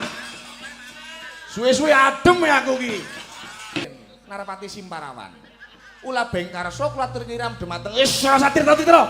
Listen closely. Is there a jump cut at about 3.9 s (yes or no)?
yes